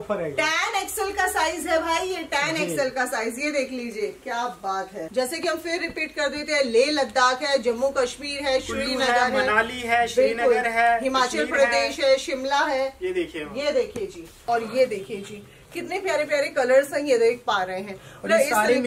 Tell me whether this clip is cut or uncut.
cut